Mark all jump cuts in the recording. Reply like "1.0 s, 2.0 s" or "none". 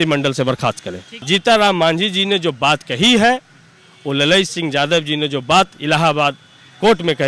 1.1 s